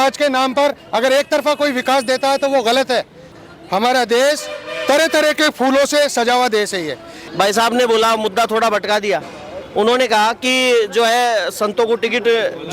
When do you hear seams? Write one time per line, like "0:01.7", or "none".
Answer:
0:03.4
0:07.2